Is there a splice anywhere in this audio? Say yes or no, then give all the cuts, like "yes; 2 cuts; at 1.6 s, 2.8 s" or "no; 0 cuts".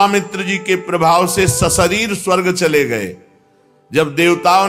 no; 0 cuts